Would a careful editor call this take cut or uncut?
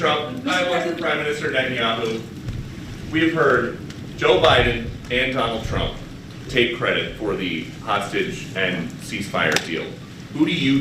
cut